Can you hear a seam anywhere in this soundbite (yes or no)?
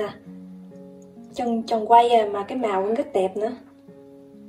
yes